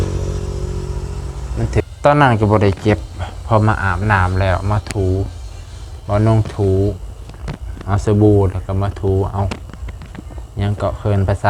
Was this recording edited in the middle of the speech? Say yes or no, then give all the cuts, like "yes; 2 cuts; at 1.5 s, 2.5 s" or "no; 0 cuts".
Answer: yes; 1 cut; at 1.8 s